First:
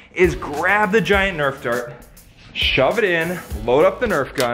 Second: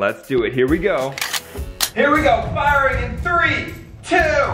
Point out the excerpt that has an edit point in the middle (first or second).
second